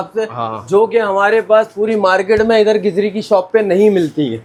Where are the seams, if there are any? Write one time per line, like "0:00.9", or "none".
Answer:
none